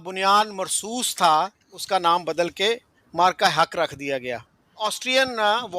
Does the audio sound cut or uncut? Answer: cut